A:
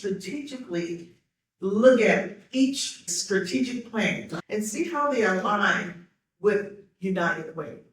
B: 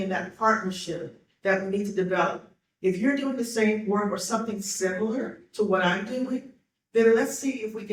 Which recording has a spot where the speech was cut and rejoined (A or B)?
A